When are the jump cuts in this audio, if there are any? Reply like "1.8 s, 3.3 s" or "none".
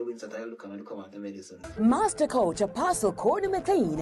1.6 s